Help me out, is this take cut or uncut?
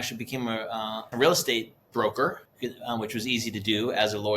cut